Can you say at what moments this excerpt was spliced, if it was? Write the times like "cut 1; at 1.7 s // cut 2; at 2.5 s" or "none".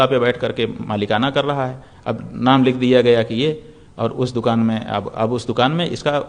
none